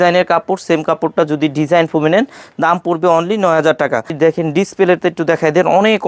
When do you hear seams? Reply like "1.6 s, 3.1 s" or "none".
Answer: 4.1 s